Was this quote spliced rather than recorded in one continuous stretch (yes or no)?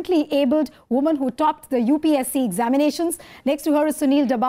yes